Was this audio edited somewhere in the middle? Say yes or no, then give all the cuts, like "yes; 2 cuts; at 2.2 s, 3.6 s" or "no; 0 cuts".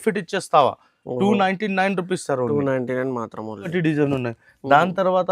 yes; 1 cut; at 3.7 s